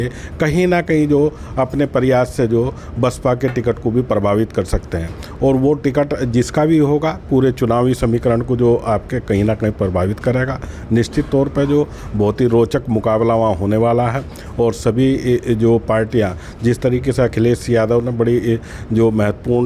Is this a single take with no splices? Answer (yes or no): yes